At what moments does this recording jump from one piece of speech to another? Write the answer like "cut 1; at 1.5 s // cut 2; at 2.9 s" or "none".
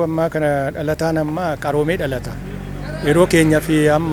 none